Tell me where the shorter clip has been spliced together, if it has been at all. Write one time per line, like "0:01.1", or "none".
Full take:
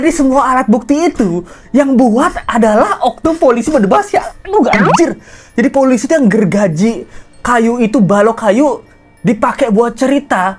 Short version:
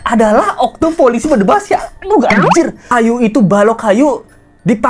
0:02.8